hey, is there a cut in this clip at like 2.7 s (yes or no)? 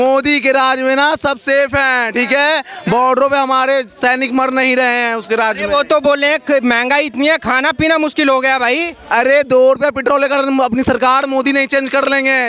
no